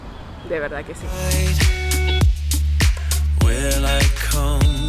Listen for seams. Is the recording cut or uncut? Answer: cut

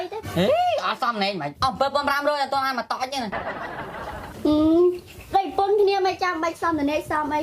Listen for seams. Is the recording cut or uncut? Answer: uncut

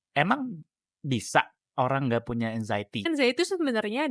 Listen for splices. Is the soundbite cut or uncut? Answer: cut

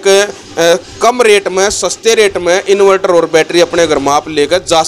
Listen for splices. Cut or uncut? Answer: uncut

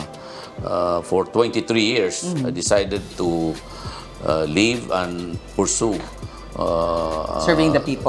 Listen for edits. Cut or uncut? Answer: uncut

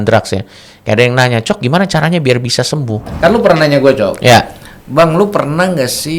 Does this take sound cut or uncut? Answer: cut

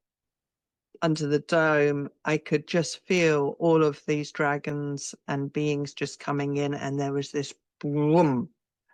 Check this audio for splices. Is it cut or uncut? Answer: uncut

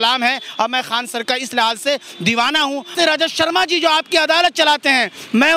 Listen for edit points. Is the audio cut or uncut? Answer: cut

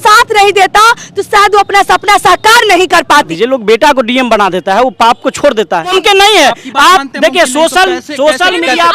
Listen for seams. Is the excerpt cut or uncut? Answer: cut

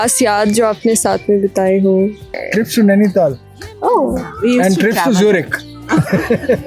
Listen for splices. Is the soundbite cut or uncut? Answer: cut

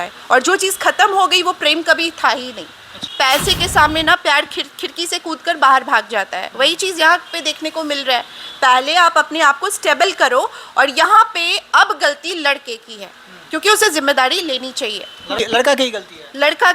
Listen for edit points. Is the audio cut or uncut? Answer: cut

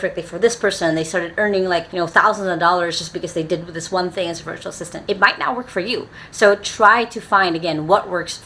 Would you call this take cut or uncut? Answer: uncut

